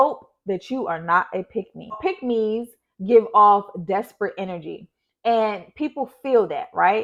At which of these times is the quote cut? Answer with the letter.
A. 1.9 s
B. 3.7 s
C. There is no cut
C